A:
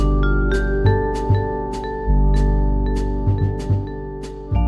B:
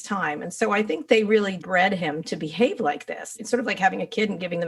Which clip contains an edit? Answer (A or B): B